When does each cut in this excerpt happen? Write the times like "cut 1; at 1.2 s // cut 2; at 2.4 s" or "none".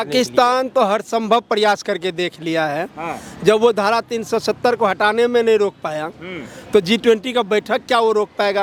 none